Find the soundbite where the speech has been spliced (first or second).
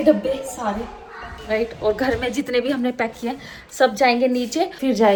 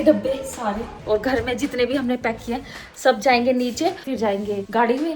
second